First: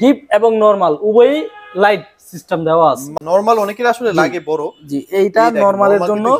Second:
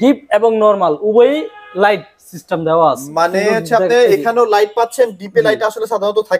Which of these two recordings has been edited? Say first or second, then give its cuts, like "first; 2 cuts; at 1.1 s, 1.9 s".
first; 1 cut; at 3.1 s